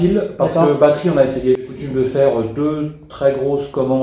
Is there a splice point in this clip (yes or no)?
yes